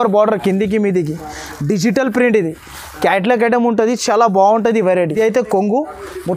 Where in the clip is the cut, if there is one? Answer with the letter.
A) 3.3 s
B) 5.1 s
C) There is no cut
B